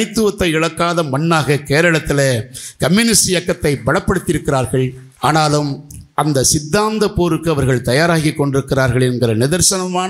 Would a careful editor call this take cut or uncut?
cut